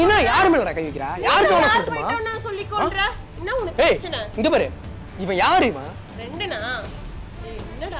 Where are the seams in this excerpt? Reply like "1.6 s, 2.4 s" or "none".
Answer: 1.1 s